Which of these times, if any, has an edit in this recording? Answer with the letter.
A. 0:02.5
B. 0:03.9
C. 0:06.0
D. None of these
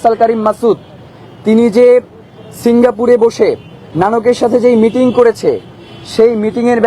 B